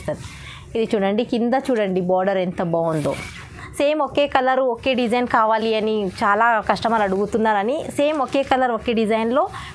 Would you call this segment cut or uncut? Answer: cut